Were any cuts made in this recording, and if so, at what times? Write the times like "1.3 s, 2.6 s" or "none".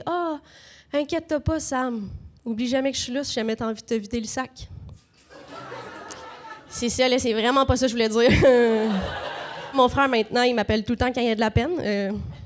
9.7 s